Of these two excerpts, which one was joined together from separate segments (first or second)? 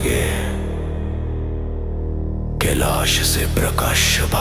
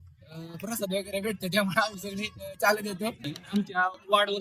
second